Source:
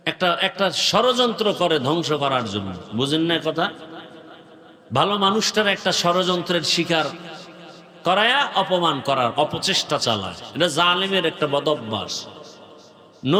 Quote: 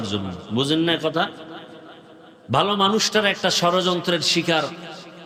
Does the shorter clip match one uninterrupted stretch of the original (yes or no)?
yes